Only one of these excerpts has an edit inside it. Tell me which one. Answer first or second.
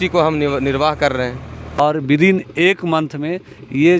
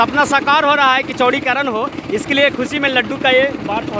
first